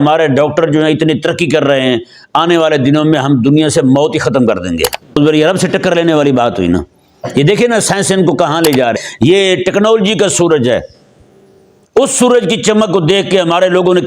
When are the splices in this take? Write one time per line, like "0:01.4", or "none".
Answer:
0:05.1
0:09.0

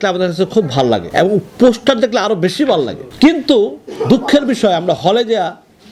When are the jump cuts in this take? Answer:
0:01.1
0:03.0

